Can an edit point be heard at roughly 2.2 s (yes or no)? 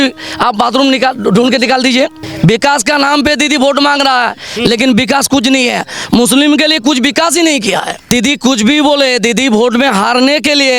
yes